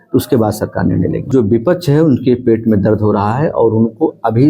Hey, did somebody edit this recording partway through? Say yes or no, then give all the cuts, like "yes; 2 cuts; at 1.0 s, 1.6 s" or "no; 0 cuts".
yes; 1 cut; at 1.3 s